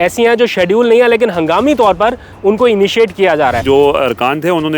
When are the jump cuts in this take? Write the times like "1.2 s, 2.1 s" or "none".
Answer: 3.6 s